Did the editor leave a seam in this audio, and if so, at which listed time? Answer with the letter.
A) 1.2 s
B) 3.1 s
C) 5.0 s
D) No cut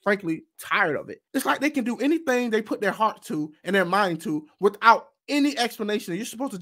A